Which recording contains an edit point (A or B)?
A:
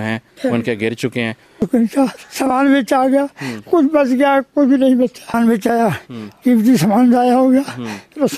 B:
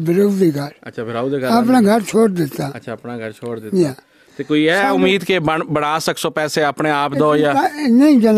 A